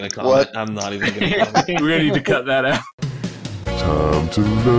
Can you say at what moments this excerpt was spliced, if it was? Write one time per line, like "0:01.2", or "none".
0:02.5